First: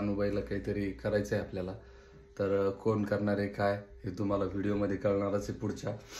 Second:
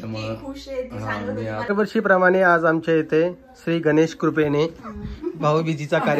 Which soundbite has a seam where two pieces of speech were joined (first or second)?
second